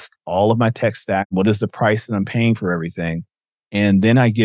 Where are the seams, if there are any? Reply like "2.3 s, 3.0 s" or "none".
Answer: 1.3 s